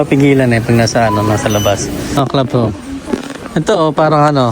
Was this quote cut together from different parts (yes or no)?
yes